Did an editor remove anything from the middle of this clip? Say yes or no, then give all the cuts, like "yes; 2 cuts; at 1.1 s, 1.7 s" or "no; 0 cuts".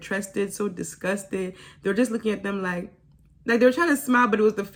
no; 0 cuts